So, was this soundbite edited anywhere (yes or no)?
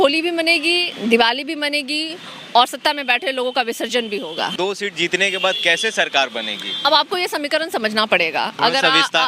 yes